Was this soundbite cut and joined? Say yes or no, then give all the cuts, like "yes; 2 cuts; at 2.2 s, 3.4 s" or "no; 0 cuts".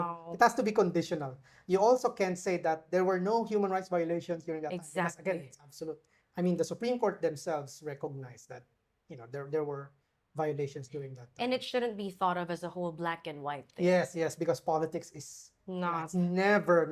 no; 0 cuts